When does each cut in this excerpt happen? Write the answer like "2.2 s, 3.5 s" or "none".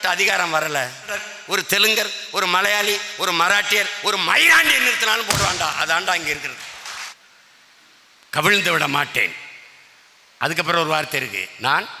1.3 s, 7.1 s